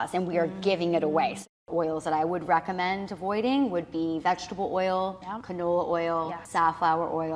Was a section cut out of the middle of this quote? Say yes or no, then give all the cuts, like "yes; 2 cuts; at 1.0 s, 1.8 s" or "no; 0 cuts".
yes; 3 cuts; at 1.5 s, 5.3 s, 6.4 s